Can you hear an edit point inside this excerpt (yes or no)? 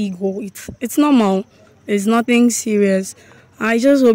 no